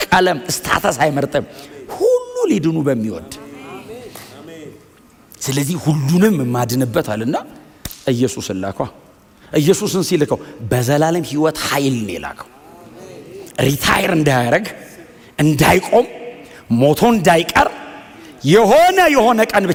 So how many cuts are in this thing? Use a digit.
0